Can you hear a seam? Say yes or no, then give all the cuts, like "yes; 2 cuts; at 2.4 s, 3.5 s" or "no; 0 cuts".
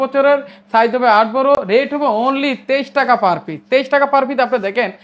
no; 0 cuts